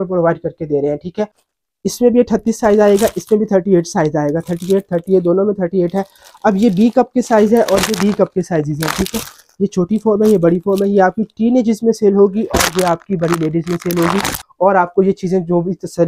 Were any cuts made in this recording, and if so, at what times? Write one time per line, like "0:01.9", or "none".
0:01.4
0:14.4